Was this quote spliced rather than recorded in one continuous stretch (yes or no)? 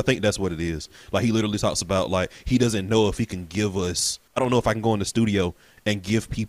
yes